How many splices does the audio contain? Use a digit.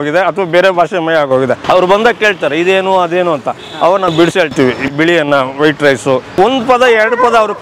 2